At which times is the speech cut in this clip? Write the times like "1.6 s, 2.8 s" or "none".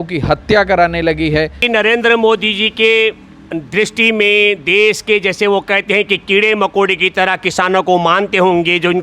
1.6 s